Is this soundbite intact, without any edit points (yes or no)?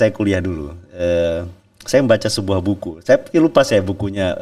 yes